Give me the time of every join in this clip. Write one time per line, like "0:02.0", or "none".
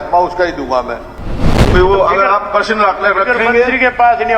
0:01.5